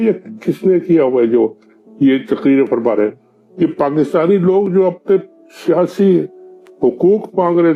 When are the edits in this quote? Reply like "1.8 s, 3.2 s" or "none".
none